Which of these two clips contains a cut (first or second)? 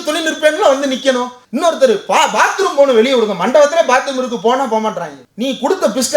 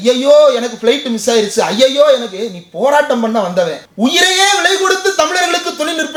first